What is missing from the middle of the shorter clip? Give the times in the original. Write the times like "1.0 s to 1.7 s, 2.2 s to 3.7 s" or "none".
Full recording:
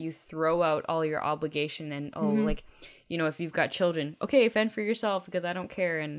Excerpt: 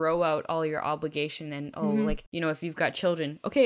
2.7 s to 3.0 s